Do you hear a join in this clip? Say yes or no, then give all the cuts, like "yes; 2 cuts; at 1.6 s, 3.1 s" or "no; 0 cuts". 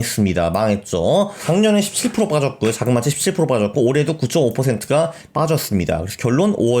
yes; 1 cut; at 1.4 s